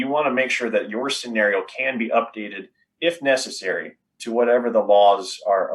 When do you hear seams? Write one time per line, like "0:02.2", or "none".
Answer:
0:04.2